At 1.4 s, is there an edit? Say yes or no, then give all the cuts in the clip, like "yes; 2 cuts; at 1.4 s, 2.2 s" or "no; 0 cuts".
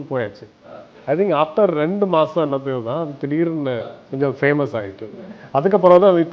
no; 1 cut; at 3.9 s